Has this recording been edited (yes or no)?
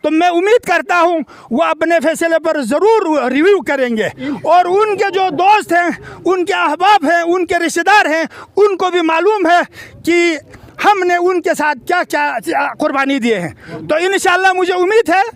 no